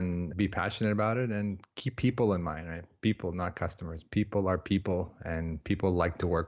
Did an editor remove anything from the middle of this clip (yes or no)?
no